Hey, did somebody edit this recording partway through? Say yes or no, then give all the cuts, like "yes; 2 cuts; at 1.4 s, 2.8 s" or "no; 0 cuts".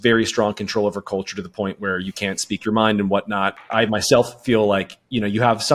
yes; 1 cut; at 3.6 s